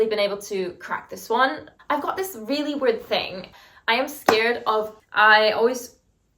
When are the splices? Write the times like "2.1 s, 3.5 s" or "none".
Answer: 1.7 s, 5.0 s